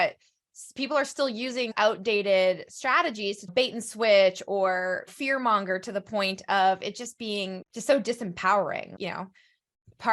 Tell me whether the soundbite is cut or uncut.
cut